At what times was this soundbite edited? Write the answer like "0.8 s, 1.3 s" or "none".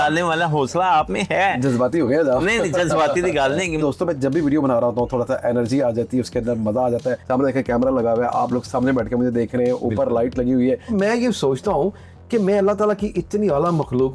3.8 s, 7.2 s, 10.9 s

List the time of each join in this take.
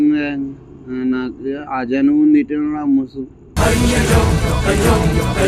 none

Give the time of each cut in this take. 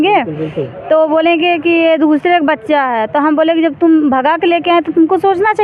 none

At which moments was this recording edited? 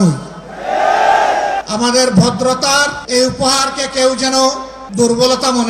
1.6 s, 3.0 s, 4.7 s

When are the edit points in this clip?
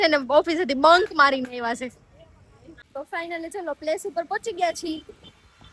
2.9 s

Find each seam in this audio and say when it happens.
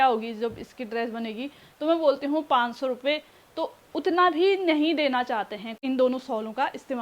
5.7 s

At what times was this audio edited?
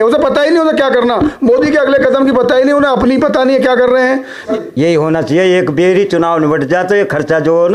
4.4 s

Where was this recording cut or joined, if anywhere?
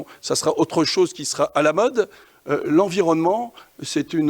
2.3 s

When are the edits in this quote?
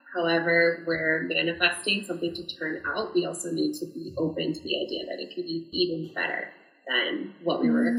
none

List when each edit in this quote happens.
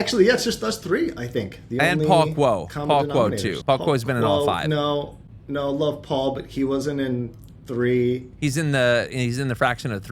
3.6 s, 8.3 s

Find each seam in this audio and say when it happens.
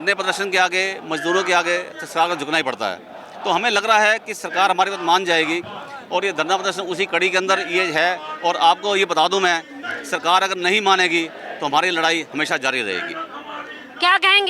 none

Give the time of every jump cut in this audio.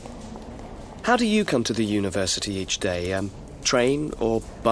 1.0 s

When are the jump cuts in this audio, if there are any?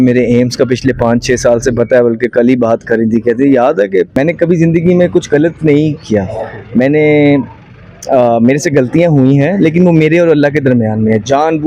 4.2 s

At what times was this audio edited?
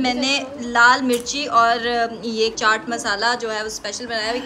none

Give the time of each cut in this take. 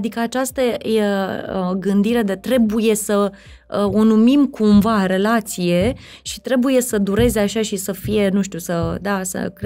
none

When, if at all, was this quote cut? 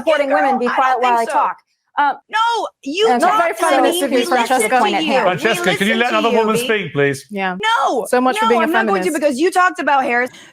2.2 s, 7.6 s

